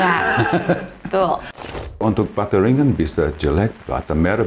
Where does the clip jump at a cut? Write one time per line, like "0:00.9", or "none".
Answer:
0:02.0